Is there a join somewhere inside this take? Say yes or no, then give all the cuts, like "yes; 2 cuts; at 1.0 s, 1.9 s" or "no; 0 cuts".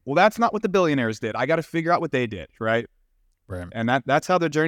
no; 0 cuts